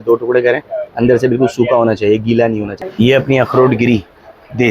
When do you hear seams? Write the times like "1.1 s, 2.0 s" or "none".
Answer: 2.8 s